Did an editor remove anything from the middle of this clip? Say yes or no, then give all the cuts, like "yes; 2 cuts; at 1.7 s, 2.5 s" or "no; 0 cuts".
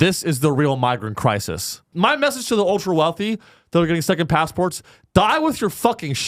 yes; 1 cut; at 1.9 s